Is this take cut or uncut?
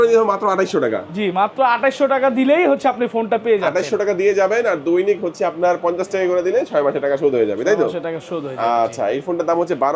uncut